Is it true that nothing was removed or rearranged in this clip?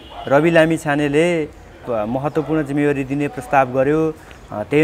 no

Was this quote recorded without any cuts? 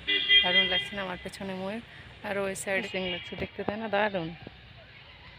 no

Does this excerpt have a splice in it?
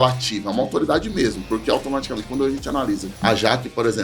yes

